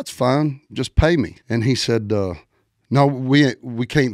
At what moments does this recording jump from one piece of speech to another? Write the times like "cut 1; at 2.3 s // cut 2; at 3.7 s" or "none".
cut 1; at 1.4 s

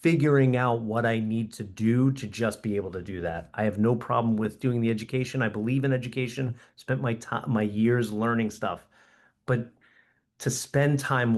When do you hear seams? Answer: none

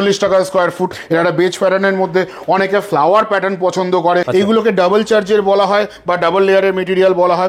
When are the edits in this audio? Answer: cut 1; at 1.0 s // cut 2; at 4.3 s

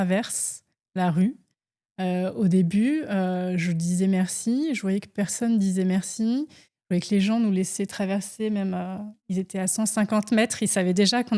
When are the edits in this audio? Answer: none

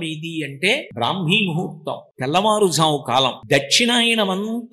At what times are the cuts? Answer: cut 1; at 0.9 s // cut 2; at 2.0 s // cut 3; at 3.4 s

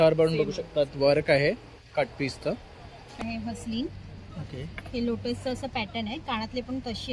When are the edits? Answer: cut 1; at 3.2 s

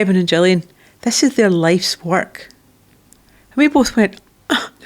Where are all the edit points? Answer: none

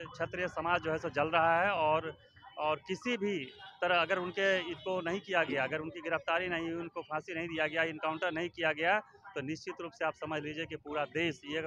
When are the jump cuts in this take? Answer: none

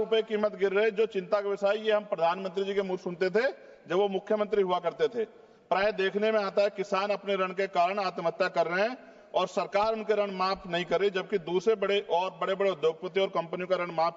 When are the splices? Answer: none

